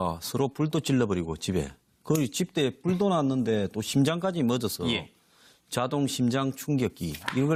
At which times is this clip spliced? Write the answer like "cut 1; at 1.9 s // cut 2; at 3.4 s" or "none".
none